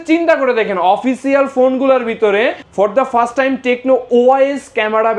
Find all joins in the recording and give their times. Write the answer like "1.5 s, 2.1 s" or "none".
2.6 s